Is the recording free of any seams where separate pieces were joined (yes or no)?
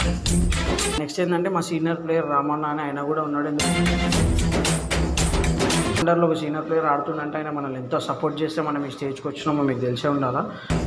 no